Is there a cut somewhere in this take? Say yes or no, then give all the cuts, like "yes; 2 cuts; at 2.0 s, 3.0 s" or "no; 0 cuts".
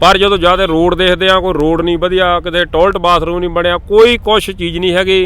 no; 0 cuts